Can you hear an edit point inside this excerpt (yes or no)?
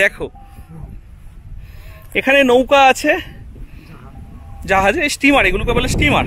no